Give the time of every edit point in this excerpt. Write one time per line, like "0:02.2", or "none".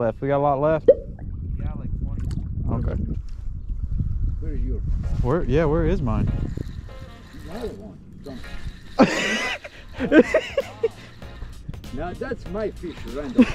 0:03.1